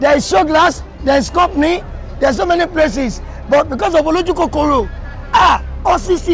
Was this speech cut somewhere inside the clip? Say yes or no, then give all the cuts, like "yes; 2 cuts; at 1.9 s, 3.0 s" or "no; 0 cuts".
no; 0 cuts